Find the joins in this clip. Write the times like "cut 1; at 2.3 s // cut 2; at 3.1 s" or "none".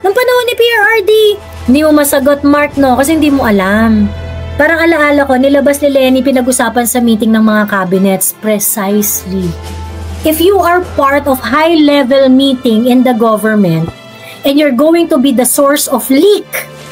cut 1; at 1.5 s